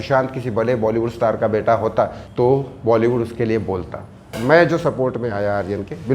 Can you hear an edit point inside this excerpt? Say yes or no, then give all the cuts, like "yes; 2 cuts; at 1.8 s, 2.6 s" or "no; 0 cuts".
yes; 2 cuts; at 2.2 s, 4.3 s